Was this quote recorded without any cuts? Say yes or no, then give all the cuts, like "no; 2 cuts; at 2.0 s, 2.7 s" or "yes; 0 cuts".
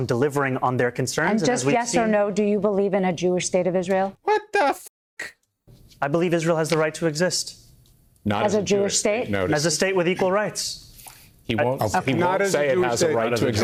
yes; 0 cuts